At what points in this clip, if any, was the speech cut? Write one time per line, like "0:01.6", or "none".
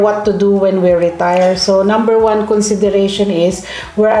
none